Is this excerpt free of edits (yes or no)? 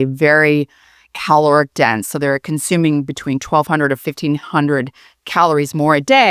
yes